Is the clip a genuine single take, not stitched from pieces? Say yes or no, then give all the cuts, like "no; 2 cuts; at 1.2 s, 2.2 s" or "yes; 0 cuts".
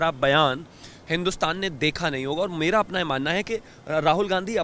yes; 0 cuts